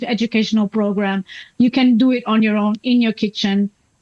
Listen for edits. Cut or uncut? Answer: uncut